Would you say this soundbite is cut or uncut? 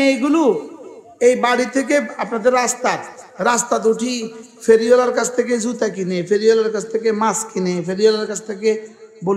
uncut